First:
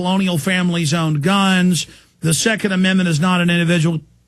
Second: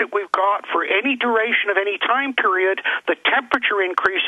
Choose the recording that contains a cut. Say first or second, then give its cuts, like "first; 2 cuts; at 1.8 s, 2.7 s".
second; 1 cut; at 2.8 s